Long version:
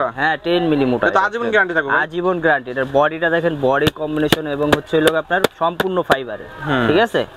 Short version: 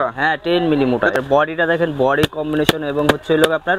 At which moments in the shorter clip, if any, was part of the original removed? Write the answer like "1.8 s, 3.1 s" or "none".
1.1 s